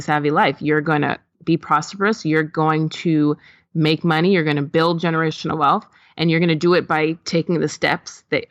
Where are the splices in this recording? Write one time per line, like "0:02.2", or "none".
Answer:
none

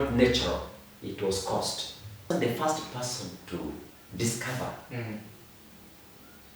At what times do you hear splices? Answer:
0:02.3

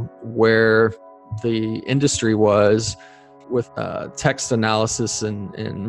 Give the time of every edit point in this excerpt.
0:03.3

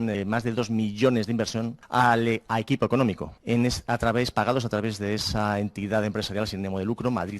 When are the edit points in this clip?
0:01.8
0:03.3

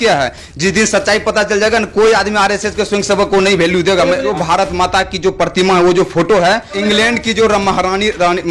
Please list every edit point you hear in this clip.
0:04.3
0:06.7

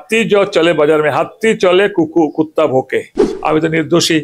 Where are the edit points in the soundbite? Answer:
0:03.3

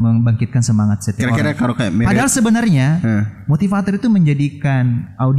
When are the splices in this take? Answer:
none

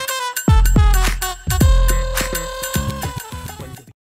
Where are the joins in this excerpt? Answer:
0:01.4

